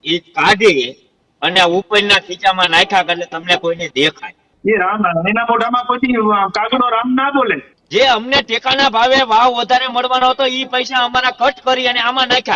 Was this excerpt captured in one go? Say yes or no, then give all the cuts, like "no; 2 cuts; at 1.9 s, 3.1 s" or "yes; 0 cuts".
no; 2 cuts; at 4.4 s, 7.7 s